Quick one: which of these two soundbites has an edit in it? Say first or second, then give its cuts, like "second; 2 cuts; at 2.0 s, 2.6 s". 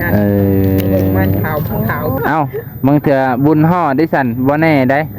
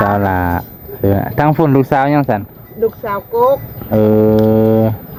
first; 1 cut; at 2.1 s